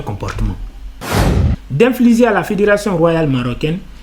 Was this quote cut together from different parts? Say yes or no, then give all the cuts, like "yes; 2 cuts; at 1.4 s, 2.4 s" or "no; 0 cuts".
yes; 1 cut; at 1.2 s